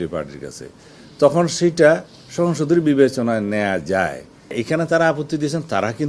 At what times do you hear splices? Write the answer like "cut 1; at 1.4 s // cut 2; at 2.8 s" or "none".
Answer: cut 1; at 4.5 s